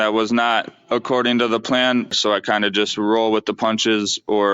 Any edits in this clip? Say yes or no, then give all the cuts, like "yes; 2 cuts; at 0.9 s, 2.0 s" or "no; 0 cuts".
yes; 1 cut; at 2.1 s